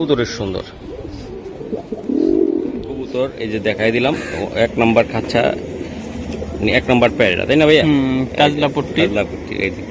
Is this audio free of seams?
no; 1 cut; at 3.1 s

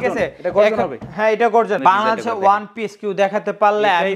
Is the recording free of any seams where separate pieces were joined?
no; 1 cut; at 1.8 s

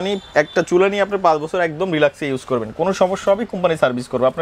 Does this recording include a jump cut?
no; 0 cuts

